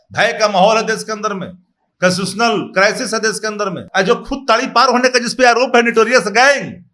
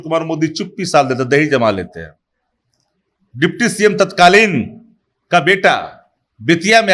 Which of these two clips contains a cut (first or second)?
first